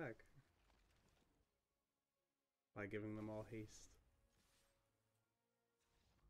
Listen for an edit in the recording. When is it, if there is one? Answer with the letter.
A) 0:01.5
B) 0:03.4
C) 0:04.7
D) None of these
A